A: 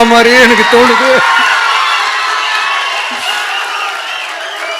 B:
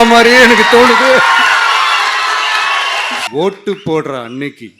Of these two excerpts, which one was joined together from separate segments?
B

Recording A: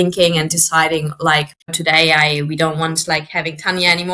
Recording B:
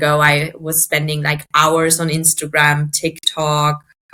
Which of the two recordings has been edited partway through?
A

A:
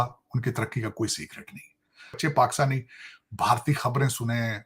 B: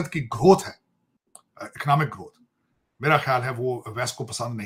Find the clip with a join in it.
A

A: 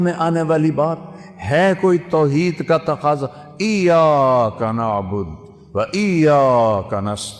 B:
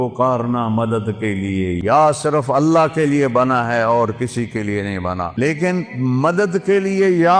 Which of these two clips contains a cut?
B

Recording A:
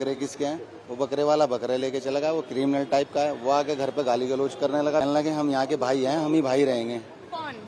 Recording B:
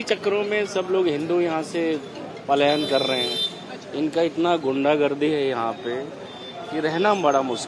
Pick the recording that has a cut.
A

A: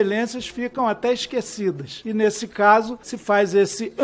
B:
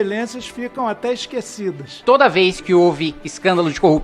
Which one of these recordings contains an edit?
B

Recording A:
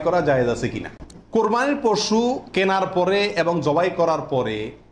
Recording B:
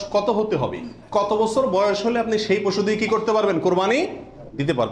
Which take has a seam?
A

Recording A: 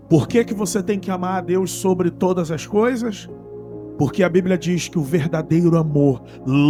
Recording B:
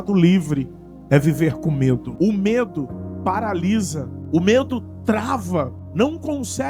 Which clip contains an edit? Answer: B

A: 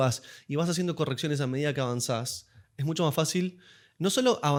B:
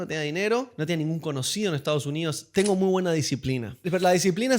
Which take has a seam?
B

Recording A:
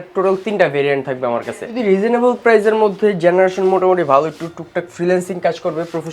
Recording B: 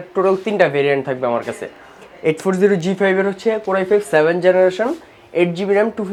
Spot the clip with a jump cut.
A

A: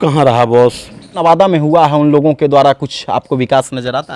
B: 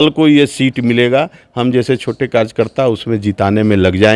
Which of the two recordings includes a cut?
A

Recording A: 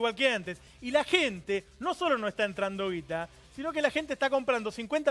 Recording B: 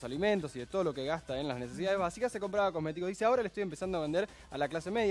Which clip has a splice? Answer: A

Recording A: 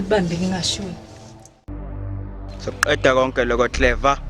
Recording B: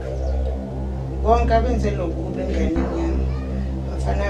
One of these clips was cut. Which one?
A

